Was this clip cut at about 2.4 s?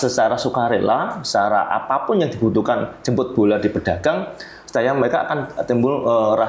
no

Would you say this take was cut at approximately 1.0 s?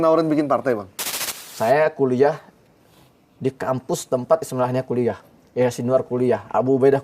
yes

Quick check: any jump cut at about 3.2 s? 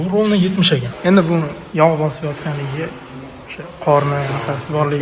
no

